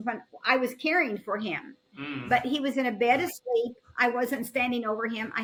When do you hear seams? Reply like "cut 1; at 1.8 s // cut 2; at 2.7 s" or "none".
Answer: none

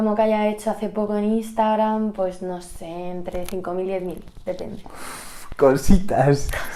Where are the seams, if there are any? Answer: none

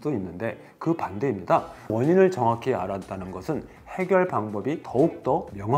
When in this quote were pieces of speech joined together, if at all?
none

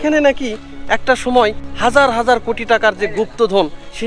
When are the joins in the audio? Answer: cut 1; at 1.7 s

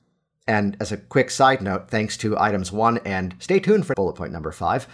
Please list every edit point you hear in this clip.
cut 1; at 4.0 s

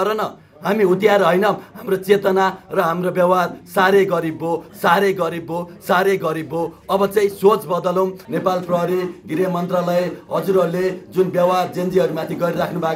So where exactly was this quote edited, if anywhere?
cut 1; at 1.7 s // cut 2; at 8.2 s

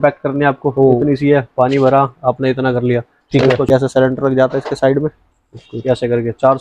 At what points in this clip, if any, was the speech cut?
cut 1; at 3.7 s

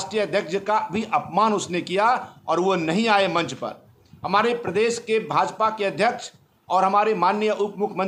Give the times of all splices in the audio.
none

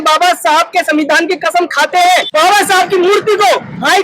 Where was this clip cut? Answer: cut 1; at 2.3 s

